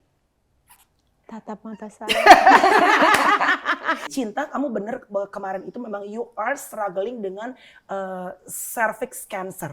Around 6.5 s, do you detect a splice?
no; 1 cut; at 4.1 s

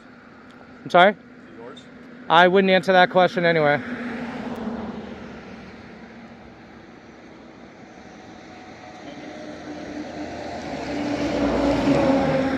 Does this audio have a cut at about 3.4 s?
no; 0 cuts

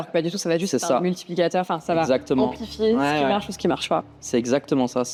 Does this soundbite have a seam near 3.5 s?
no; 0 cuts

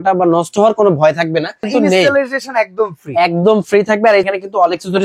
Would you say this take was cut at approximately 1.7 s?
yes; 2 cuts; at 1.7 s, 4.3 s

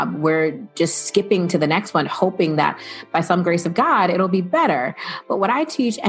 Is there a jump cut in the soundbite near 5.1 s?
no; 0 cuts

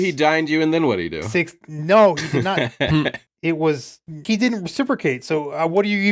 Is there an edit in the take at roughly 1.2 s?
yes; 3 cuts; at 1.2 s, 2.6 s, 4.2 s

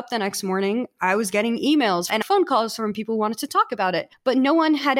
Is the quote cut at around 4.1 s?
yes; 2 cuts; at 2.1 s, 4.1 s

